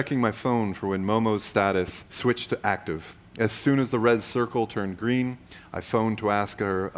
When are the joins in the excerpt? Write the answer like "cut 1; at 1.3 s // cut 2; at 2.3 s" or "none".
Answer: cut 1; at 2.0 s